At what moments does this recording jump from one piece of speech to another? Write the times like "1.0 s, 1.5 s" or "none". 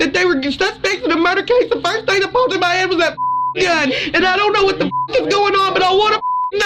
3.9 s